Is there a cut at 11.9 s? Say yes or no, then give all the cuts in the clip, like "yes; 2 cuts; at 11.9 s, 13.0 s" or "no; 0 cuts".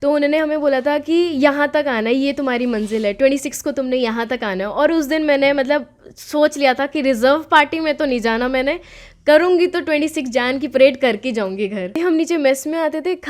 yes; 1 cut; at 11.9 s